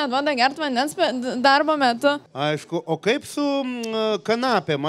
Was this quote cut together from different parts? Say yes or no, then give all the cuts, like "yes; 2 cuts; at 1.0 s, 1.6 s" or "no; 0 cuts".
yes; 1 cut; at 2.3 s